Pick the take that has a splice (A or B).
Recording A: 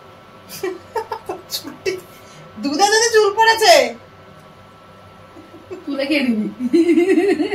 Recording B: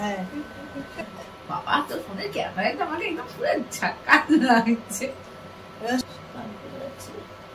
B